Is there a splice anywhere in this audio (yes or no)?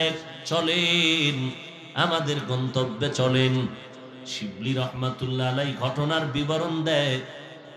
no